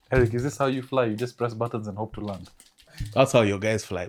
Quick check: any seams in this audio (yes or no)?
no